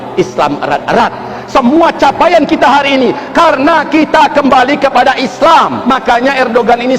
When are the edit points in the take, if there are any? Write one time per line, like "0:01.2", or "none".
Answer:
0:05.8